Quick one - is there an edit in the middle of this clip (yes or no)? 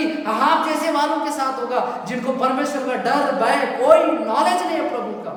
no